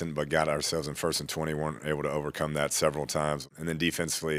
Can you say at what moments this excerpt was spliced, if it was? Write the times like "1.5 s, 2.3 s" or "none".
3.5 s